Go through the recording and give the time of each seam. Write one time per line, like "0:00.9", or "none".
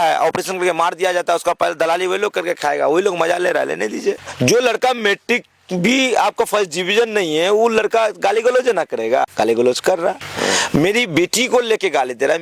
0:04.3
0:09.3
0:10.3